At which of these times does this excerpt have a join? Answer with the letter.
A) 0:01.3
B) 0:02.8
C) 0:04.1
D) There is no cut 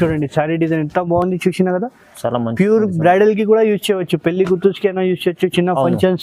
D